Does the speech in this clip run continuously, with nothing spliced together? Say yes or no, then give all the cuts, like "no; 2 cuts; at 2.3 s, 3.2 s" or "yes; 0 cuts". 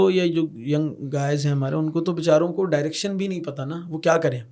yes; 0 cuts